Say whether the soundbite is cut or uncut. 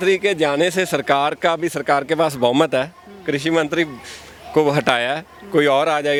uncut